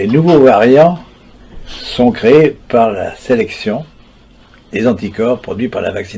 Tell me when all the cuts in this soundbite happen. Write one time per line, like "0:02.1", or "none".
none